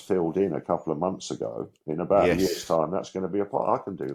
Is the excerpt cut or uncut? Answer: uncut